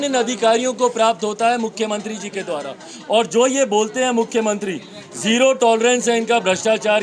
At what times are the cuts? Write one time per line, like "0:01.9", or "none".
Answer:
none